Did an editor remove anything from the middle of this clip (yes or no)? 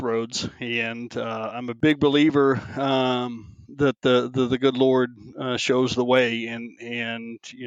no